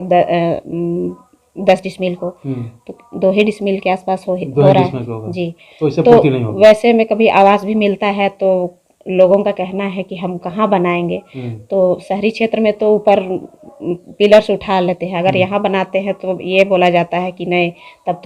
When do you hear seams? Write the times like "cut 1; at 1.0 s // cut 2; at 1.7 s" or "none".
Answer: none